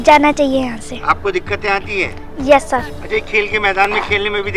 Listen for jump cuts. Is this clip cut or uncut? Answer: uncut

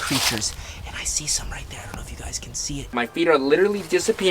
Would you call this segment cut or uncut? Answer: cut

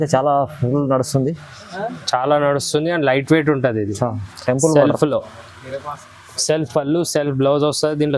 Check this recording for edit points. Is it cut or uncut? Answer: uncut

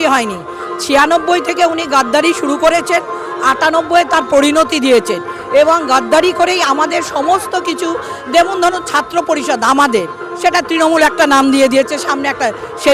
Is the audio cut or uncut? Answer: uncut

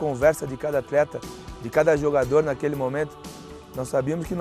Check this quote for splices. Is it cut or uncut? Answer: uncut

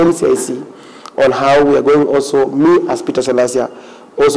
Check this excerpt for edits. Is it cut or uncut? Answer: uncut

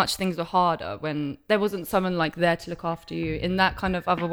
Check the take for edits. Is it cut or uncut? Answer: uncut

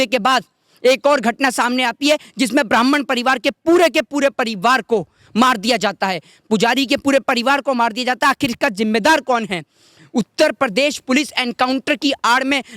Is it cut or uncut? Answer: uncut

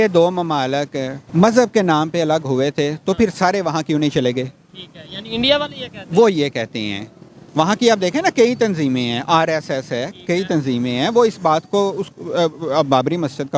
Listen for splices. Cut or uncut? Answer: cut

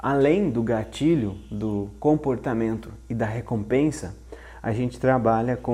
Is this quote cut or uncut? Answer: uncut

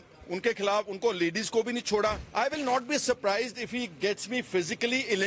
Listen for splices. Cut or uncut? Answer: cut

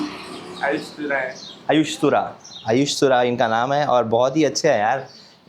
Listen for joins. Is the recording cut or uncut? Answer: uncut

